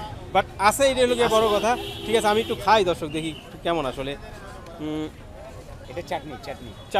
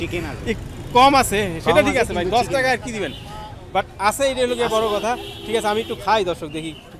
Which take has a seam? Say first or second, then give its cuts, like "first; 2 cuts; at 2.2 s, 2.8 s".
first; 1 cut; at 5.8 s